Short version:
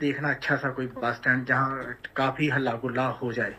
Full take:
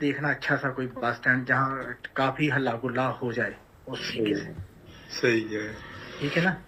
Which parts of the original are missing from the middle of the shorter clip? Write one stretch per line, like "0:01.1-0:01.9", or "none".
none